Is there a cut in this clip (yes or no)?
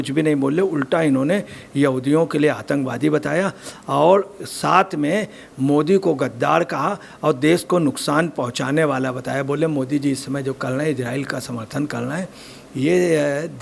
no